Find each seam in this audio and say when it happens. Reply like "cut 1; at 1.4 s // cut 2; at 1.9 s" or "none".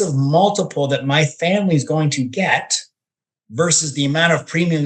none

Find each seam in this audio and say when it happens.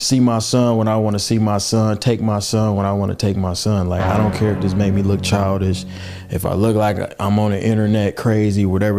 none

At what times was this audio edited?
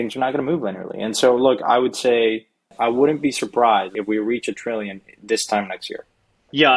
cut 1; at 2.7 s // cut 2; at 3.9 s

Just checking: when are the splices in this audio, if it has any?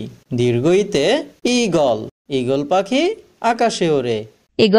cut 1; at 2.2 s

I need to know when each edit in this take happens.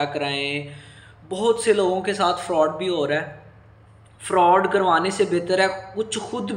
none

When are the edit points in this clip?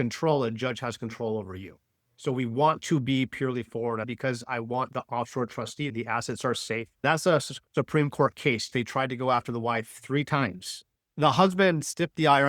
cut 1; at 4.1 s // cut 2; at 5.9 s // cut 3; at 7.0 s // cut 4; at 8.7 s

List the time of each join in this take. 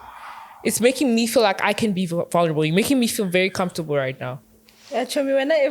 none

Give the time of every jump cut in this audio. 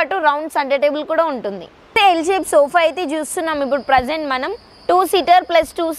cut 1; at 1.9 s

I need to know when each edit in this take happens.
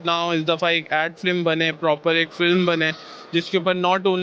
none

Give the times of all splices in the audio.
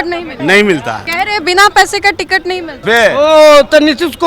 cut 1; at 1.0 s // cut 2; at 2.8 s

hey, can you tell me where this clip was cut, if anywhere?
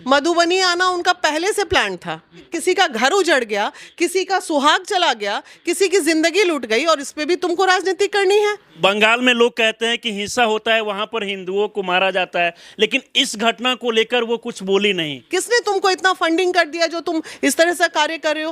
cut 1; at 2.4 s // cut 2; at 8.7 s // cut 3; at 15.1 s

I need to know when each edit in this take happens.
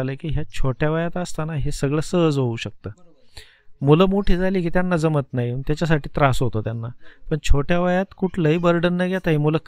none

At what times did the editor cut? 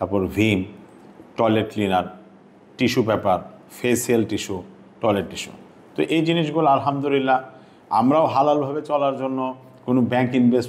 none

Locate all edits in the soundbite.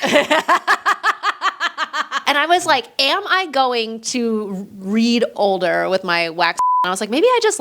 cut 1; at 2.2 s // cut 2; at 5.3 s // cut 3; at 6.8 s

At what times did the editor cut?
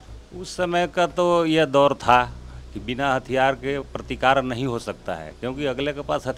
none

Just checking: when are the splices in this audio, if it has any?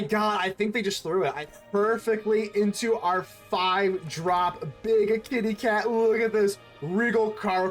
cut 1; at 1.4 s

